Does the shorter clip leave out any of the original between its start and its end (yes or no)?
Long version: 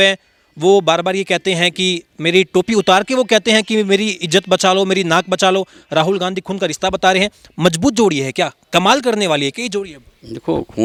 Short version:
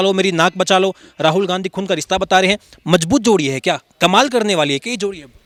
no